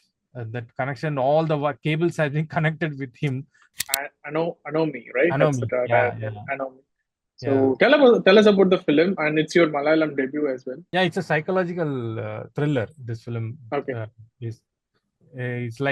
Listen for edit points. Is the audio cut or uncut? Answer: cut